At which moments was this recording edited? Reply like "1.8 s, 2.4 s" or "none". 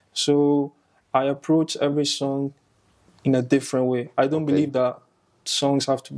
none